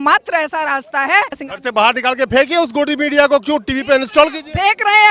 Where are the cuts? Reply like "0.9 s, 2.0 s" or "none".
1.4 s